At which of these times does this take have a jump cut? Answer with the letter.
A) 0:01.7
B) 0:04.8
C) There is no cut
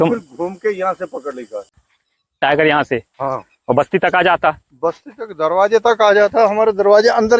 A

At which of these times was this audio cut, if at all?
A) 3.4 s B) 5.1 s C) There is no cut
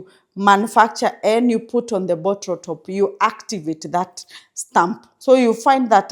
B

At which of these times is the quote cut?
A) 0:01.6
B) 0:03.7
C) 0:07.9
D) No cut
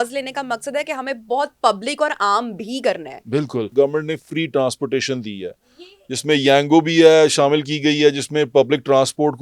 B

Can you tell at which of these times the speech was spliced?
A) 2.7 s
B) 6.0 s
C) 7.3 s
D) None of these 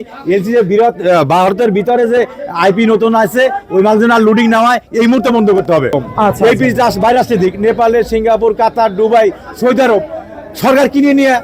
B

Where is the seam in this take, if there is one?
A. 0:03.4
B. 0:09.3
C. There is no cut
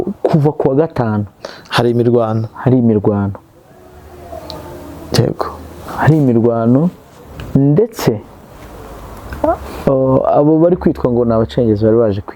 C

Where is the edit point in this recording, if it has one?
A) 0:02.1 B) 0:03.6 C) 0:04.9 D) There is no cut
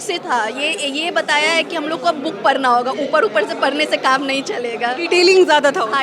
D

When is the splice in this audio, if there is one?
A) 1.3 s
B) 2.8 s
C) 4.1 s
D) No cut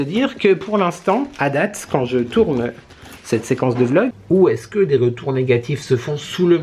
C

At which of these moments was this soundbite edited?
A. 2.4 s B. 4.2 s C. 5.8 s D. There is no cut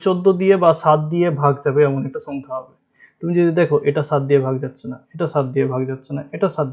D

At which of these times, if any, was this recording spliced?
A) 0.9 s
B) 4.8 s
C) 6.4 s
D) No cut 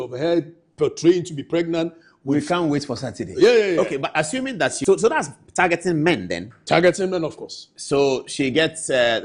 B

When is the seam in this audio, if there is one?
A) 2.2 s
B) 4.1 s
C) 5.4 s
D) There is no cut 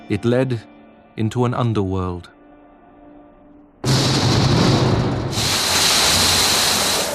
D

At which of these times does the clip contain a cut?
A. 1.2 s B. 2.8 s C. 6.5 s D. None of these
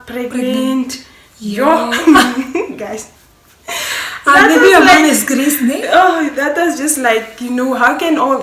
D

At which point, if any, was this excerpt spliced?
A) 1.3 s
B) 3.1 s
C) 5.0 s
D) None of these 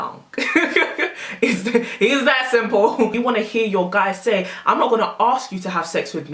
B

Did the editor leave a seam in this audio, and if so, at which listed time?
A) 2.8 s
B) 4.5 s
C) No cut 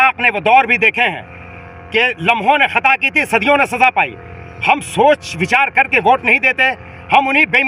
C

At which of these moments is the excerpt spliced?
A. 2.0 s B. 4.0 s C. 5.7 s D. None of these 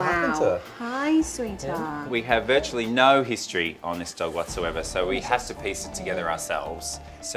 A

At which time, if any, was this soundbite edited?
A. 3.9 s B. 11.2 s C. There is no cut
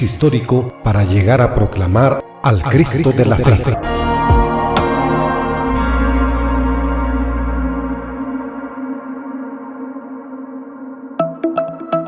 B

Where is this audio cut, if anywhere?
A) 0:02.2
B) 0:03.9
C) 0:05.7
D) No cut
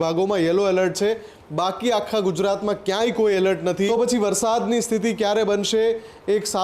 B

